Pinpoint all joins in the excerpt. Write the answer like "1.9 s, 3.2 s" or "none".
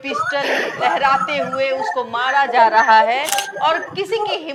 none